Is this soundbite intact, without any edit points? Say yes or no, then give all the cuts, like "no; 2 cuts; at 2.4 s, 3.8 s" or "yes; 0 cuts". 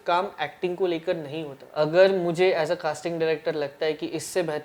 no; 1 cut; at 1.6 s